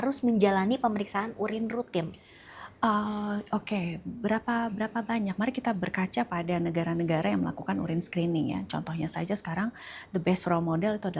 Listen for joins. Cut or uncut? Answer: uncut